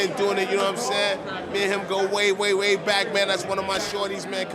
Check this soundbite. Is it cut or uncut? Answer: uncut